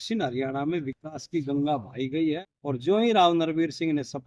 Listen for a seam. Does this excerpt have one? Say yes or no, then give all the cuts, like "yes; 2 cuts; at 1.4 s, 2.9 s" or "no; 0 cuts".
yes; 1 cut; at 2.2 s